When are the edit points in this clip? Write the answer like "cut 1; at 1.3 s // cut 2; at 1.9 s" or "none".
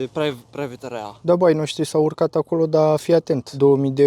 none